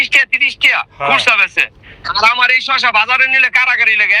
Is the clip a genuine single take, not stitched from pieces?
yes; 0 cuts

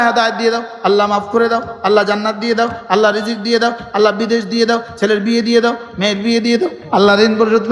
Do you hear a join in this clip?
yes; 1 cut; at 6.8 s

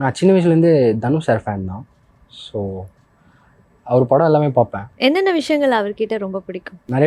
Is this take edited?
no; 0 cuts

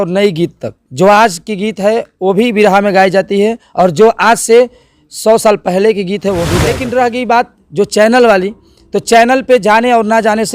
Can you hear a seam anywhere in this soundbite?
yes; 1 cut; at 6.7 s

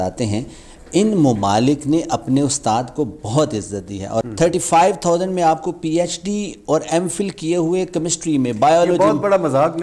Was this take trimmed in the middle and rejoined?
yes; 1 cut; at 4.3 s

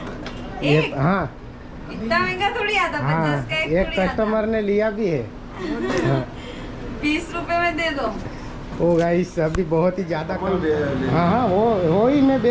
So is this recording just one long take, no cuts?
no; 1 cut; at 10.4 s

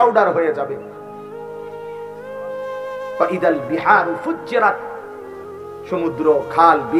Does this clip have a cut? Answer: yes; 2 cuts; at 0.9 s, 2.7 s

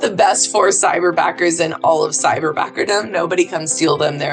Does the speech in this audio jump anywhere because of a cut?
no; 0 cuts

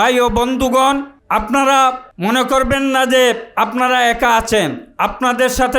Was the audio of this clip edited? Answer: yes; 2 cuts; at 1.1 s, 2.1 s

